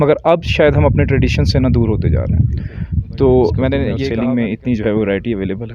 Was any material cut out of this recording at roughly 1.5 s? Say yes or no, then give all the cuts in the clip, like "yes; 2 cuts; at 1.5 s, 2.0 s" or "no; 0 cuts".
no; 1 cut; at 4.0 s